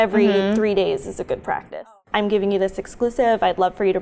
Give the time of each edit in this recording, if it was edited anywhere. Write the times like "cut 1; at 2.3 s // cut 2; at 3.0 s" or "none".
cut 1; at 1.7 s